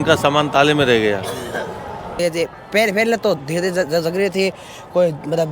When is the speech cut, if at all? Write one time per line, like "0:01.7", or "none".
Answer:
0:02.1